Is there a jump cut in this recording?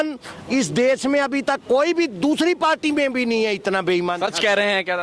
no; 0 cuts

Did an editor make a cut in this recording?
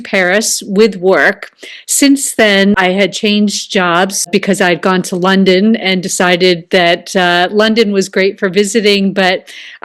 yes; 2 cuts; at 2.8 s, 4.3 s

